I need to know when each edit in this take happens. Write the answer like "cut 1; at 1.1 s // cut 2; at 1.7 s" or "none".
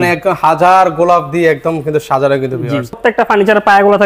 cut 1; at 3.0 s